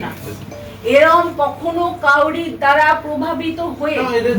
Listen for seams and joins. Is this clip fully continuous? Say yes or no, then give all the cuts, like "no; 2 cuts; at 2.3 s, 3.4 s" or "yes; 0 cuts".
yes; 0 cuts